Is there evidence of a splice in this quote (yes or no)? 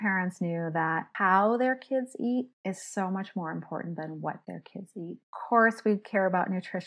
yes